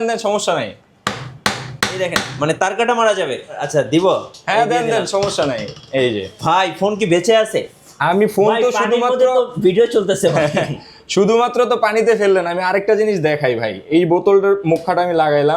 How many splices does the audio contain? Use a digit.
1